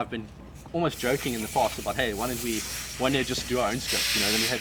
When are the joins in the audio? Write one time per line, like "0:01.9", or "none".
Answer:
none